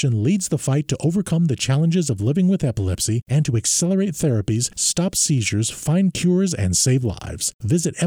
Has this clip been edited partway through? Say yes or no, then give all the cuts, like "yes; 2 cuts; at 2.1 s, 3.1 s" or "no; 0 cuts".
no; 0 cuts